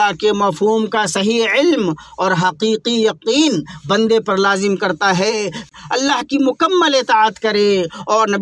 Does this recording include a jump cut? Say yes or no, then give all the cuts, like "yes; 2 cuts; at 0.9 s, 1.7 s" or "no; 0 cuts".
yes; 1 cut; at 5.7 s